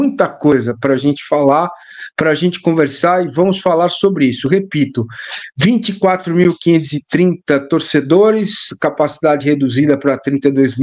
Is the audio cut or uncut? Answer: uncut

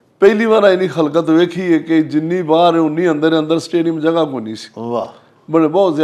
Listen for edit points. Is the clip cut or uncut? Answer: uncut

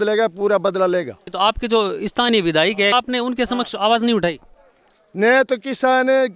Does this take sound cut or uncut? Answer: cut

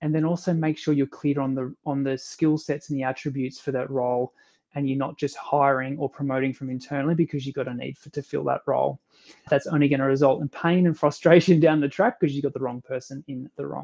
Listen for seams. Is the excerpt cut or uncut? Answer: uncut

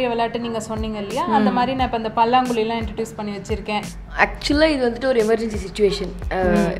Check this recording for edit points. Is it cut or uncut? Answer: cut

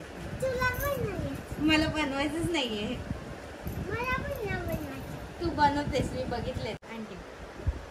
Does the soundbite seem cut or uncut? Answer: cut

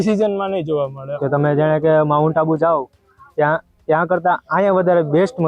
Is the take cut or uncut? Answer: cut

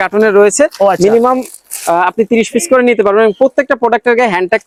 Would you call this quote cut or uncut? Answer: uncut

